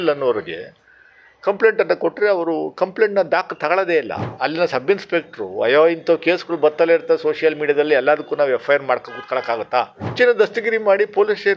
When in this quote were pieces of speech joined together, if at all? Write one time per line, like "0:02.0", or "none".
0:04.2
0:10.1